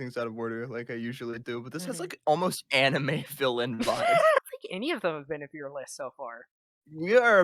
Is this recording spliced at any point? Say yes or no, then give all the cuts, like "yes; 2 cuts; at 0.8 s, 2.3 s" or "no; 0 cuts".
yes; 1 cut; at 4.5 s